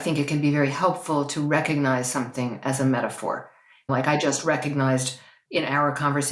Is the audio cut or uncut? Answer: cut